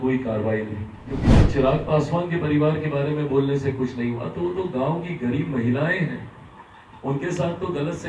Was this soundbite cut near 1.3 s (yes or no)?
yes